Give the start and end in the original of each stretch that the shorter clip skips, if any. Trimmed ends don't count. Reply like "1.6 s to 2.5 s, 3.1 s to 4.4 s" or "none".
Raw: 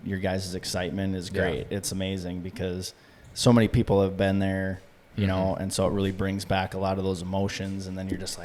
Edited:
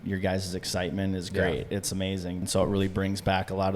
2.5 s to 5.7 s